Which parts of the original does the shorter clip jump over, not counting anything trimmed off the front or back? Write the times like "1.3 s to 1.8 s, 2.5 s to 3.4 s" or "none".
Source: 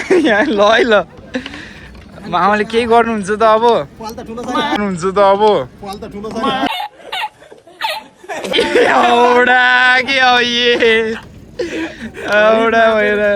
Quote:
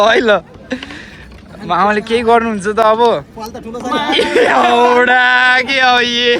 4.8 s to 8.5 s